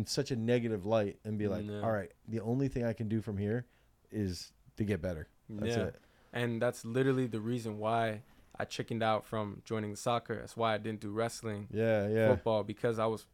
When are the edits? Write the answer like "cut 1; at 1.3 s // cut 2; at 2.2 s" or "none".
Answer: none